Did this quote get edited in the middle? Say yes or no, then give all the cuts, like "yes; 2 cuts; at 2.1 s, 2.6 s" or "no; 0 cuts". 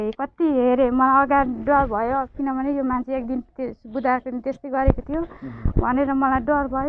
no; 0 cuts